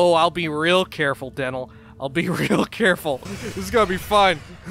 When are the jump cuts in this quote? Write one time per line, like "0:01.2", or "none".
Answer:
0:03.3